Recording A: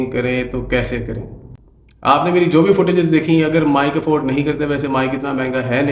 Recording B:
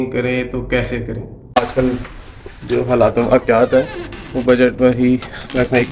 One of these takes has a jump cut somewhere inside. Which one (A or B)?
B